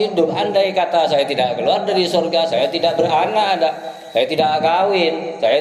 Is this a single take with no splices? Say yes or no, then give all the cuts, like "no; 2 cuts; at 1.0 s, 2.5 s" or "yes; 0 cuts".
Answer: yes; 0 cuts